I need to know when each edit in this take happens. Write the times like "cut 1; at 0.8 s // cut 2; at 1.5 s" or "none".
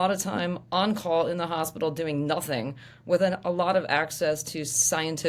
none